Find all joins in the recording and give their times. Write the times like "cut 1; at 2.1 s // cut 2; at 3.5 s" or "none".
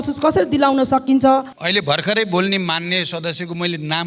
cut 1; at 1.5 s